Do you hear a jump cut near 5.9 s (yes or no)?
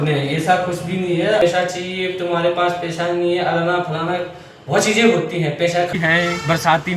yes